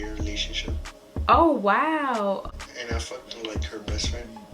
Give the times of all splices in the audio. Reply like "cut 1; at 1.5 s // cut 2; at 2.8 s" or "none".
cut 1; at 2.4 s